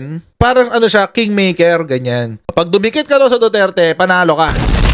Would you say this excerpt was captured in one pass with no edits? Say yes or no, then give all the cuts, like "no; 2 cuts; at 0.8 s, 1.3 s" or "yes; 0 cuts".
no; 1 cut; at 2.5 s